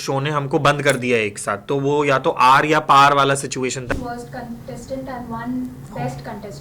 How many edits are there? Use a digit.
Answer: 1